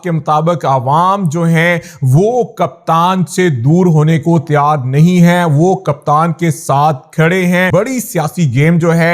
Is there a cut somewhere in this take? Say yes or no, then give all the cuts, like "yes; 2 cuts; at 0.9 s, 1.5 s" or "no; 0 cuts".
yes; 1 cut; at 7.7 s